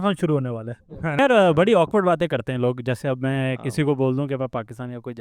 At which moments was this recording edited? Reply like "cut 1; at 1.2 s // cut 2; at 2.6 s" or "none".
cut 1; at 1.2 s